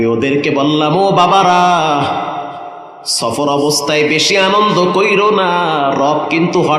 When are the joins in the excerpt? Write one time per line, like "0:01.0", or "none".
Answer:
none